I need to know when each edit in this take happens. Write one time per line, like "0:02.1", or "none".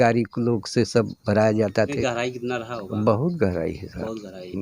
0:01.9